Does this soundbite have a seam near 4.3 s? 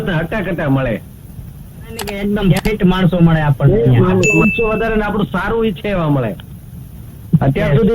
yes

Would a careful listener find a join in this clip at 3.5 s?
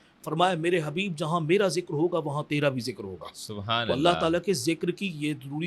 no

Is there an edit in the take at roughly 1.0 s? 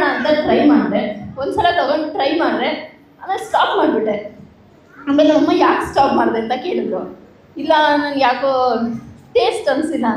no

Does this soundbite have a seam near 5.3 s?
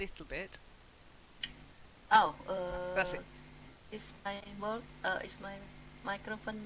yes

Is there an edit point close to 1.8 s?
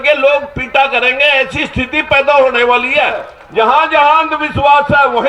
no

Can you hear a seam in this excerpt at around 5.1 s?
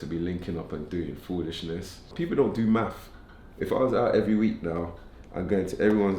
no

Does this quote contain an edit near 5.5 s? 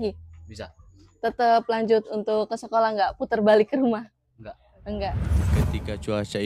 yes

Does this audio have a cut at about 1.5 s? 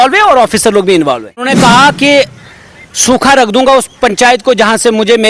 yes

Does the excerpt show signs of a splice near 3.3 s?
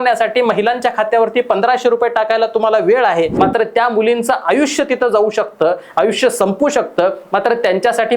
yes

